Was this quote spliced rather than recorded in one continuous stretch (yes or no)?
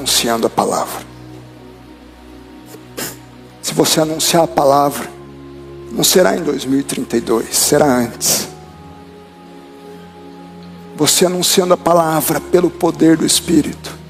no